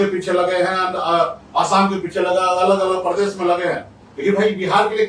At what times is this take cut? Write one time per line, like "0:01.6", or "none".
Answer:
none